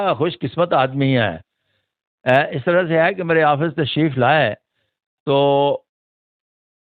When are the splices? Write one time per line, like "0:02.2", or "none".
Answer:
none

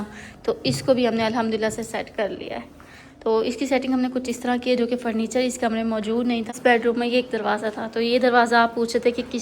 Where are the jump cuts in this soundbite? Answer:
0:06.5

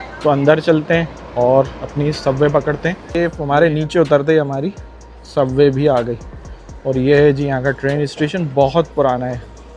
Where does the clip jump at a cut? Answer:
0:03.0

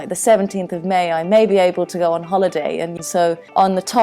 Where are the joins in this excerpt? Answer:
0:03.0

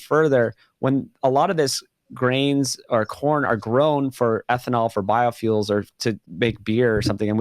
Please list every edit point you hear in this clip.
0:06.3

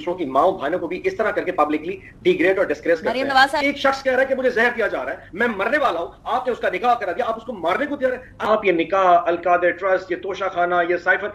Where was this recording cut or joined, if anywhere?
0:03.6
0:08.3

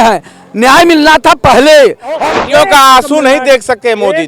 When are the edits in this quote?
0:02.2

